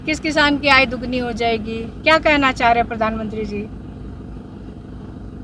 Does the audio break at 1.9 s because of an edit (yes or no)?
no